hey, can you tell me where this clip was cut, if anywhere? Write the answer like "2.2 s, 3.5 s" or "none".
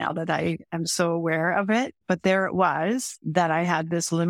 2.0 s, 3.2 s